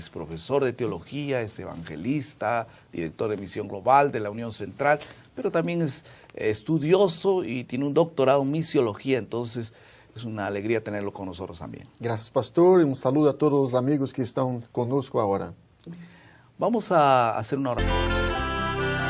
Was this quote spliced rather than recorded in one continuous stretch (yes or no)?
no